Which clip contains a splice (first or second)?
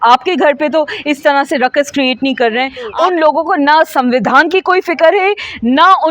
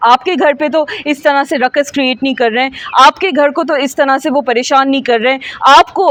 first